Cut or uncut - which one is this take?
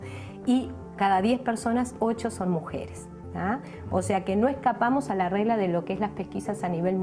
cut